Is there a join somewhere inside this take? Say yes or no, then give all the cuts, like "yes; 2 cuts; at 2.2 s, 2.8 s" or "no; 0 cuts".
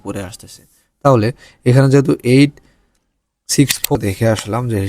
yes; 1 cut; at 4.0 s